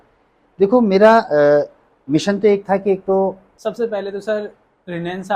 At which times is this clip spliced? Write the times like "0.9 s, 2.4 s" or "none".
3.5 s